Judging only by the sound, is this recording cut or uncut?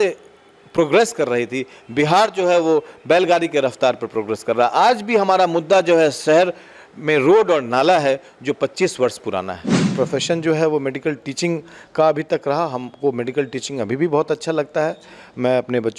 cut